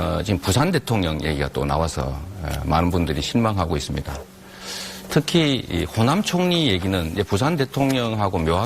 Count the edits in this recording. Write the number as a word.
one